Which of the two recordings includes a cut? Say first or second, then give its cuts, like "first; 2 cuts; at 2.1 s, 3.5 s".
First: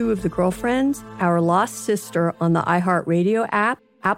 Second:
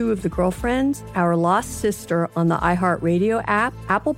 second; 1 cut; at 1.0 s